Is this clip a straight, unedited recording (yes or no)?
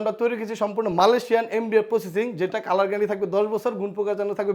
yes